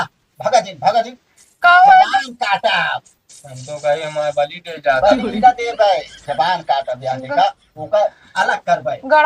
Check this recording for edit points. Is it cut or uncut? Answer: uncut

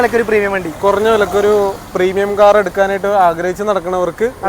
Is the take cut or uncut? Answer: uncut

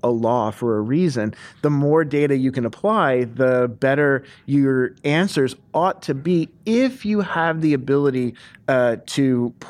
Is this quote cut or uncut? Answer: uncut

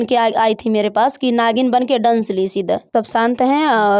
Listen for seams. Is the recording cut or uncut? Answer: uncut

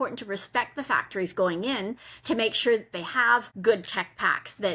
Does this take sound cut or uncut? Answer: cut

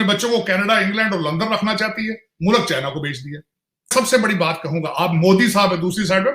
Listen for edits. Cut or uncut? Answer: cut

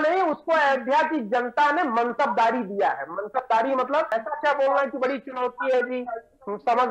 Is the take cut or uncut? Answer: cut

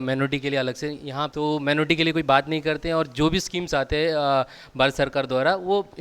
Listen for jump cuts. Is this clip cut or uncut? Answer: cut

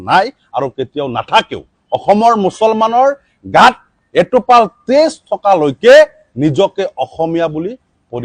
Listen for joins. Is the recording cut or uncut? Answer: uncut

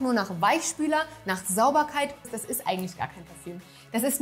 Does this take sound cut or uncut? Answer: cut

